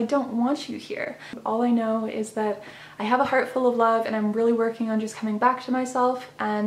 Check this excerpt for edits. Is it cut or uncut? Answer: cut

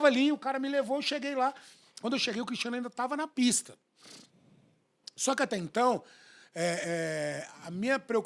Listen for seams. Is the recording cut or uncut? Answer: uncut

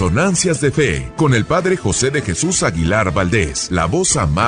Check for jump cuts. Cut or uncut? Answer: cut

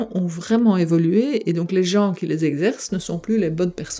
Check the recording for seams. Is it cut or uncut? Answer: uncut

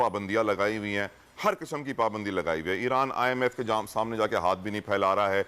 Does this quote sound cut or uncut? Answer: uncut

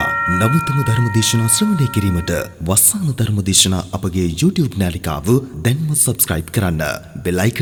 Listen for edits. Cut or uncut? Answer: uncut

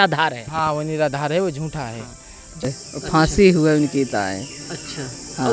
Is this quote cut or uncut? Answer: cut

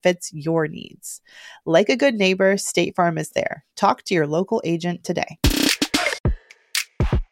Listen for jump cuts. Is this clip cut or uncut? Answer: cut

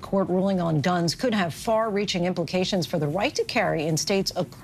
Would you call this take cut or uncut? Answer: uncut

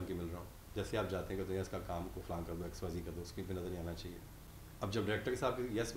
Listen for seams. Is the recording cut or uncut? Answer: uncut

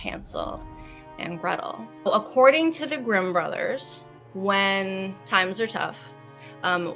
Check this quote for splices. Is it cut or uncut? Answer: cut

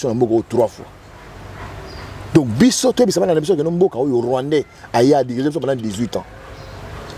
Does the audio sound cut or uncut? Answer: uncut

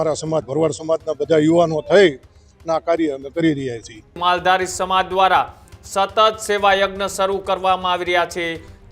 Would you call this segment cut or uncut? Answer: cut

